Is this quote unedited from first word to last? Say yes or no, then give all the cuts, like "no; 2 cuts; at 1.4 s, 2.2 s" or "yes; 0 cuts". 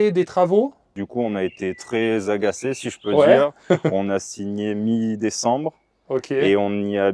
no; 1 cut; at 1.0 s